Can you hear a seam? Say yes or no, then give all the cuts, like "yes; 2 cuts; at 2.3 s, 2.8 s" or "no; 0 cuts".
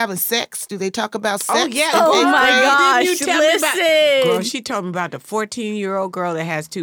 no; 0 cuts